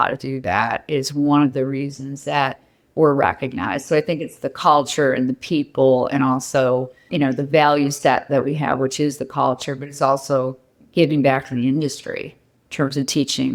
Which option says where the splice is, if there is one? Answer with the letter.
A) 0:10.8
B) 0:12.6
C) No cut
C